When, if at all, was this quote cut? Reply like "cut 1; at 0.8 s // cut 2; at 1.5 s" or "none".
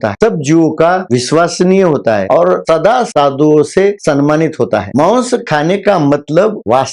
cut 1; at 4.9 s